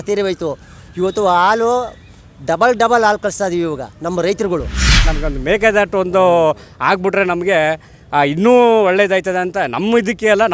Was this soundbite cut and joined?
yes; 1 cut; at 5.1 s

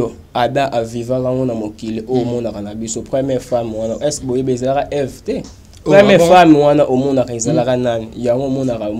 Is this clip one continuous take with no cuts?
yes; 0 cuts

